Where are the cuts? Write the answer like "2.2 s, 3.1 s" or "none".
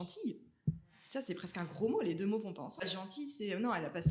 2.8 s